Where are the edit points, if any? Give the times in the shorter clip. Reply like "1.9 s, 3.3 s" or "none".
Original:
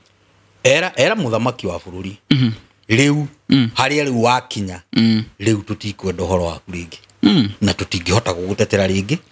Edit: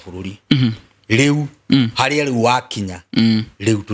none